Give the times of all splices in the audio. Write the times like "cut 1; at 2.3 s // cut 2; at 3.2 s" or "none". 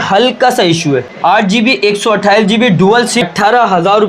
cut 1; at 1.1 s // cut 2; at 3.2 s

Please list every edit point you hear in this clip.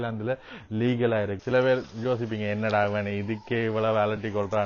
cut 1; at 1.4 s

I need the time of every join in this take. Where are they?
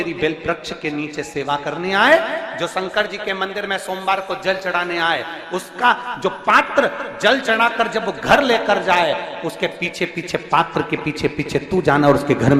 none

